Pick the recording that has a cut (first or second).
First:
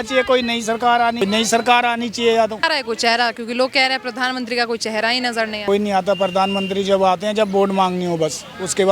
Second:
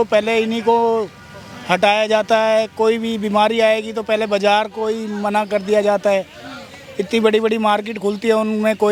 first